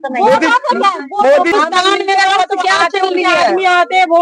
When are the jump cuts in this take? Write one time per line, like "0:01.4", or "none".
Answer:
0:01.5